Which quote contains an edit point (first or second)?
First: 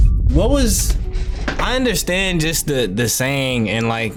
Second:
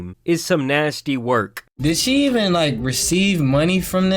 second